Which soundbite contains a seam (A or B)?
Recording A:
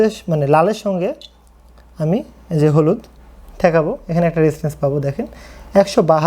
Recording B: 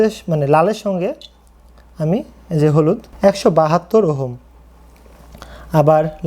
B